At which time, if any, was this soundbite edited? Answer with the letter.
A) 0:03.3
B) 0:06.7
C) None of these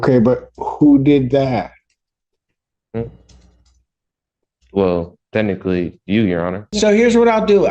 B